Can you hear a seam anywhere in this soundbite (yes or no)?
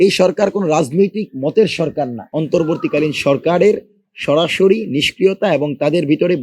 yes